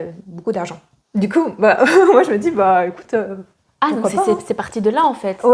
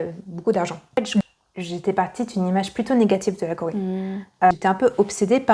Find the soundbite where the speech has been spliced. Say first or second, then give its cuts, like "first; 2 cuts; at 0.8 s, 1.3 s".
second; 2 cuts; at 1.2 s, 4.5 s